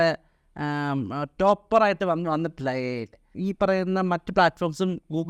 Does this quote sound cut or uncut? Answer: cut